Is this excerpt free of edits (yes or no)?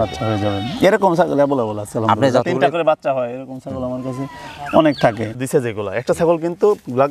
no